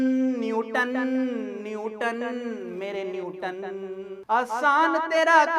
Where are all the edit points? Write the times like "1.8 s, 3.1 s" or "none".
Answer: none